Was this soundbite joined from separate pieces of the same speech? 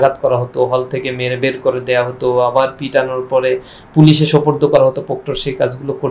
no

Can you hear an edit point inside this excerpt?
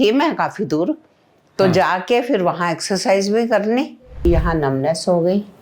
yes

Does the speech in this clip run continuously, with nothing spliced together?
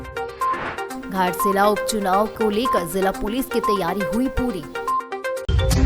no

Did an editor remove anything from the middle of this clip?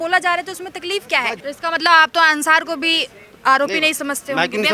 yes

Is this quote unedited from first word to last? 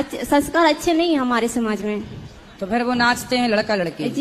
yes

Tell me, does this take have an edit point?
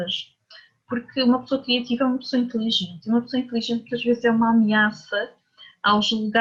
no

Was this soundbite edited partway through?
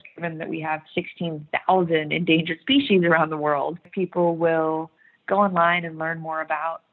yes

